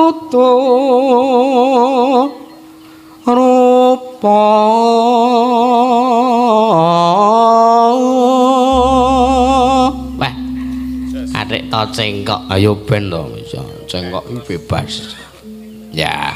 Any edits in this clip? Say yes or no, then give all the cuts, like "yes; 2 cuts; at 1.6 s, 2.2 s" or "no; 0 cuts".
no; 0 cuts